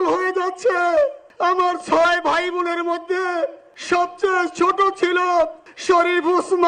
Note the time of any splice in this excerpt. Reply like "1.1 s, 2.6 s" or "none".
1.2 s, 3.7 s, 5.7 s